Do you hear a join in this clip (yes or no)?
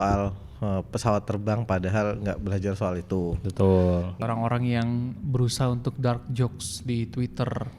yes